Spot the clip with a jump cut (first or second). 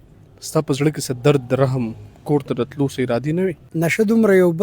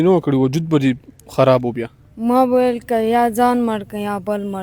first